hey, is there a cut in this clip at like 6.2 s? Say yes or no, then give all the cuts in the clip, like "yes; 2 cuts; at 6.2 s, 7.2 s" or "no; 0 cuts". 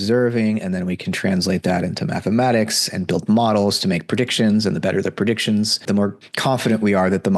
yes; 1 cut; at 6.2 s